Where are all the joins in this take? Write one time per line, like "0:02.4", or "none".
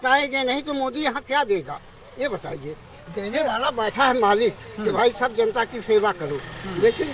none